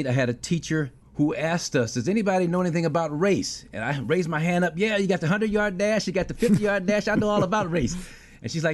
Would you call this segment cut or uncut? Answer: cut